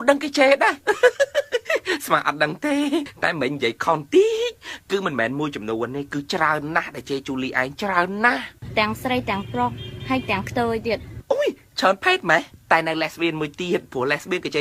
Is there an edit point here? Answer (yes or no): yes